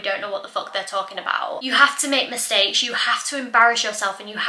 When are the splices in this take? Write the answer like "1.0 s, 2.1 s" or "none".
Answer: 1.6 s